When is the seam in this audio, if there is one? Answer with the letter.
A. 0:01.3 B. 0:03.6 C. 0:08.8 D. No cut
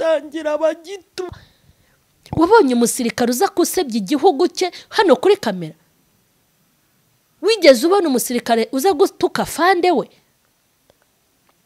A